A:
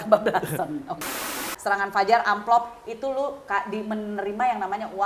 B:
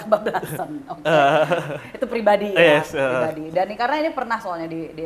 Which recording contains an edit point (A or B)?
A